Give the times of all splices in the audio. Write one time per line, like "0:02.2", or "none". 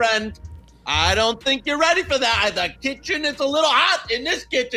none